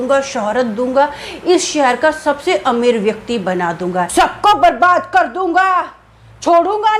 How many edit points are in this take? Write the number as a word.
one